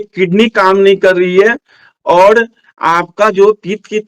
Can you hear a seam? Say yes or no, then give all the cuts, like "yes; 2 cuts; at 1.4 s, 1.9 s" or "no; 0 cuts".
no; 0 cuts